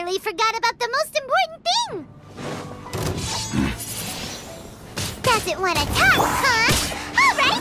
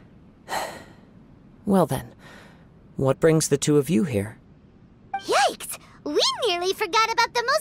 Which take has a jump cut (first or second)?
first